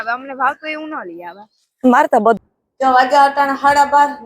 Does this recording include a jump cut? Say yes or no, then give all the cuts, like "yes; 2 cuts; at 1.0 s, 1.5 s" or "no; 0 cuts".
yes; 1 cut; at 2.4 s